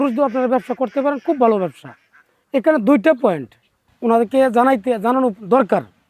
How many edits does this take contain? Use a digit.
1